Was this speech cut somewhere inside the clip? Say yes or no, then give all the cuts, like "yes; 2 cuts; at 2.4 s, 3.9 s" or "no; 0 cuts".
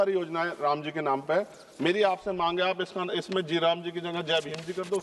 no; 0 cuts